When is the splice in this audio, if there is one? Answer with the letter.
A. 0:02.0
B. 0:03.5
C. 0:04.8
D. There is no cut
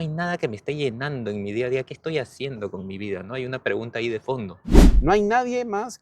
C